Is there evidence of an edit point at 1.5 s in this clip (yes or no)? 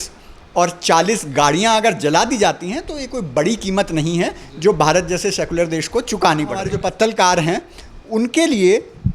no